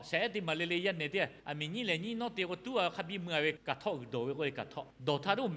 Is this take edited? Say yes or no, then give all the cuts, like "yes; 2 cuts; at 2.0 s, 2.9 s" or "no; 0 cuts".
yes; 2 cuts; at 1.4 s, 3.6 s